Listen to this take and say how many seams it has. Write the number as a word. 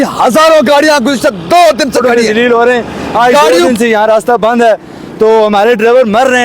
one